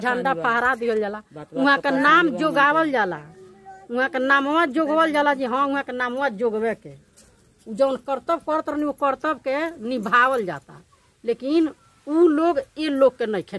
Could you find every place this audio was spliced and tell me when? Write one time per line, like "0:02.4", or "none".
none